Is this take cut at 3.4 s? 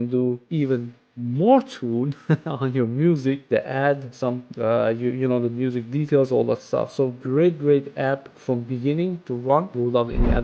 no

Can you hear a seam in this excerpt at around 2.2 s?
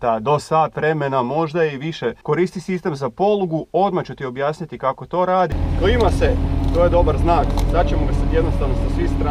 yes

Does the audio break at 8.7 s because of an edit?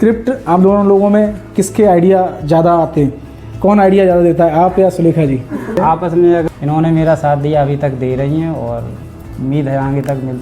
no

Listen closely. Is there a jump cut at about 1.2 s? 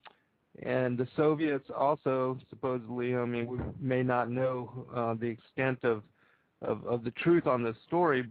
no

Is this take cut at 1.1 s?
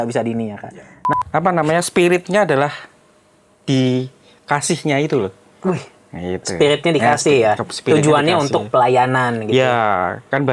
yes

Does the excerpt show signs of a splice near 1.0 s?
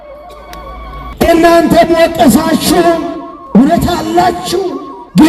yes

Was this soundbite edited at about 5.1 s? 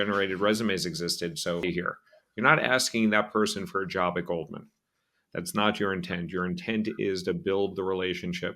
no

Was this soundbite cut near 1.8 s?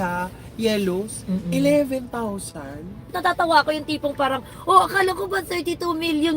no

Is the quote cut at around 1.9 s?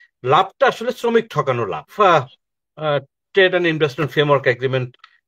yes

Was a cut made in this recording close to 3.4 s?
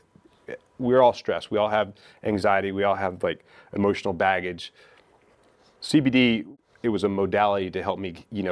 no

